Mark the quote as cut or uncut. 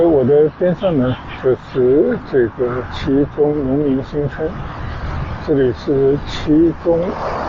uncut